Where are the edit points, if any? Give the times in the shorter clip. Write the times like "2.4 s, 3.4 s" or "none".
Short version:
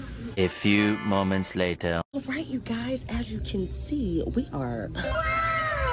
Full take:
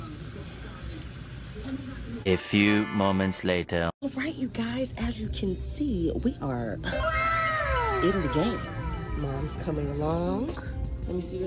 none